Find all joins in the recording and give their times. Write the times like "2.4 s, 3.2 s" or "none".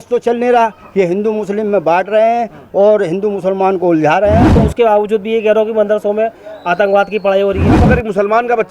4.6 s, 7.8 s